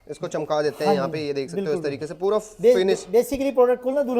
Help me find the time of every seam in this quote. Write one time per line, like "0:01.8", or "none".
none